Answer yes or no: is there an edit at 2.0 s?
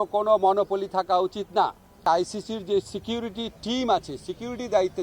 yes